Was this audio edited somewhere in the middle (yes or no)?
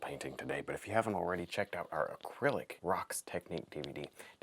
yes